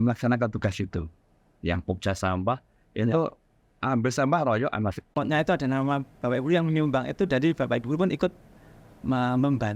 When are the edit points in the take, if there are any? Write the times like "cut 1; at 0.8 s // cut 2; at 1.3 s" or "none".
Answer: cut 1; at 5.1 s

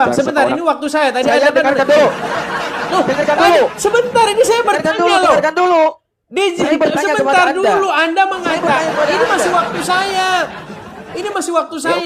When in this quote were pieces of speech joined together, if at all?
none

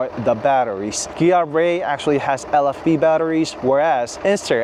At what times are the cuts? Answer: none

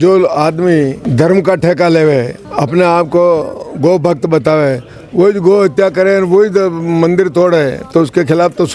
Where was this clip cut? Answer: cut 1; at 1.0 s // cut 2; at 2.4 s

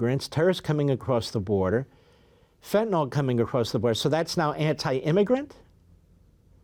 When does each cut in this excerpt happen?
none

